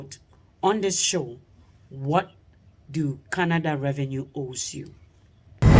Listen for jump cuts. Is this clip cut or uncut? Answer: cut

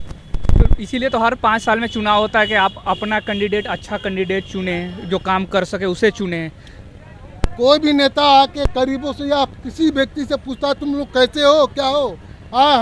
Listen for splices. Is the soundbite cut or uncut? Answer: uncut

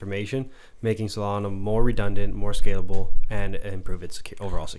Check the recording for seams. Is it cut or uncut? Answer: uncut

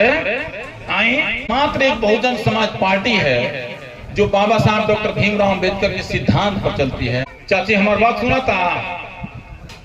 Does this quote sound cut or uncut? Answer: cut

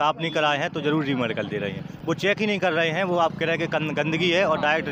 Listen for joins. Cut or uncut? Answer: uncut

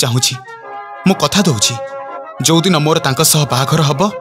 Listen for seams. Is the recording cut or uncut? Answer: uncut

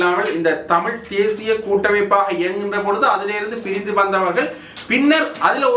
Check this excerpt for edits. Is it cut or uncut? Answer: uncut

